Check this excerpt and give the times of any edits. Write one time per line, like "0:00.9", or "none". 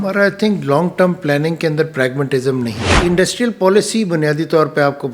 0:02.9